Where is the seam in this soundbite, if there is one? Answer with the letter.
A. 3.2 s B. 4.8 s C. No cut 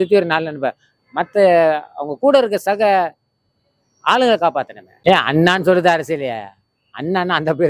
B